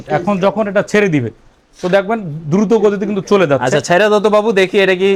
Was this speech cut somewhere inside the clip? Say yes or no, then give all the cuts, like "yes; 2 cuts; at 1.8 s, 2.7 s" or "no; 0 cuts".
no; 0 cuts